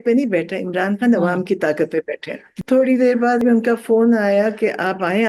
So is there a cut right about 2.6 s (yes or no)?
yes